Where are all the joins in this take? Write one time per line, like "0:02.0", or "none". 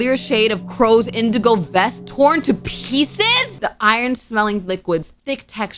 0:03.5